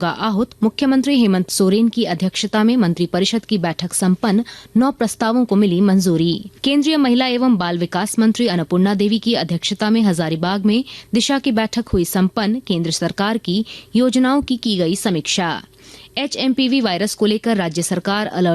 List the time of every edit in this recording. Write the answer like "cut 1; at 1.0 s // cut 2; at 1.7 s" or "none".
cut 1; at 6.5 s